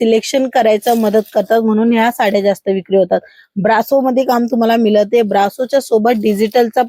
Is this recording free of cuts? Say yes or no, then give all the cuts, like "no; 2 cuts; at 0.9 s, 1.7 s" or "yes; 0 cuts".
yes; 0 cuts